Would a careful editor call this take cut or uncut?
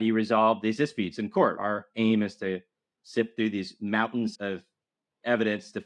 cut